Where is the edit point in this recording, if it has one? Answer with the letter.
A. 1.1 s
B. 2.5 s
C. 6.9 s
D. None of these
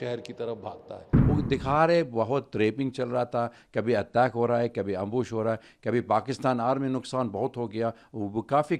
A